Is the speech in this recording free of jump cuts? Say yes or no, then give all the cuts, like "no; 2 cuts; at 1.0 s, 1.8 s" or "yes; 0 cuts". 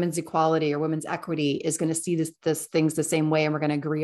yes; 0 cuts